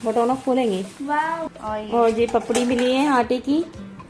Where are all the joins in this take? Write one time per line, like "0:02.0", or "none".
0:01.5